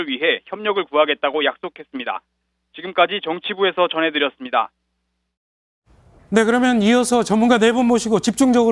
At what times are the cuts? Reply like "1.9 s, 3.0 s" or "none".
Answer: 3.1 s